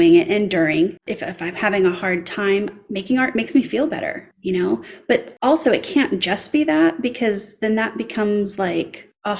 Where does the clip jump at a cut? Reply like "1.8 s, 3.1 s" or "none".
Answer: 1.1 s, 4.3 s, 5.3 s